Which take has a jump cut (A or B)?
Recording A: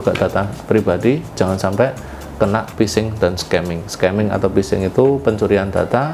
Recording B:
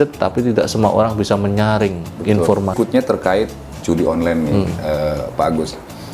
B